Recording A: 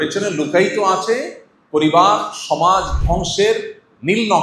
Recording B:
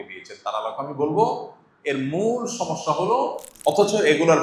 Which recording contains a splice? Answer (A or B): B